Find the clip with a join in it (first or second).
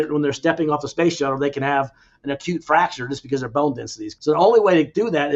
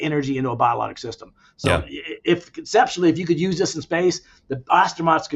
first